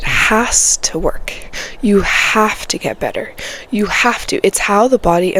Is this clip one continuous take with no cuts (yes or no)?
yes